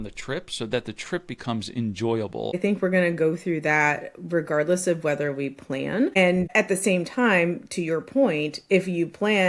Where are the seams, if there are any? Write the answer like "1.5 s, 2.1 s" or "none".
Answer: 2.6 s, 6.3 s